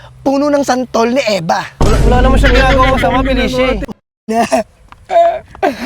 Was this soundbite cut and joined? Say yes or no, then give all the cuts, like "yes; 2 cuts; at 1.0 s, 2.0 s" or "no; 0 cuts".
yes; 1 cut; at 3.9 s